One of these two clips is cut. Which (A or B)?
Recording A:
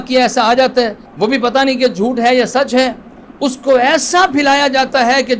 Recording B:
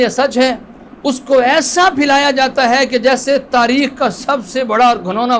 A